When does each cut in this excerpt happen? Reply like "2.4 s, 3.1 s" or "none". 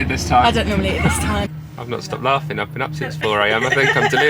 1.5 s